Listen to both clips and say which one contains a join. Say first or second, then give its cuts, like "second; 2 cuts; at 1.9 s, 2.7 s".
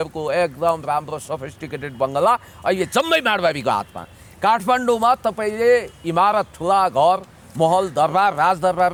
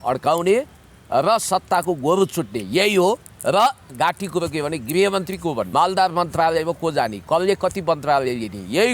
second; 2 cuts; at 3.9 s, 5.7 s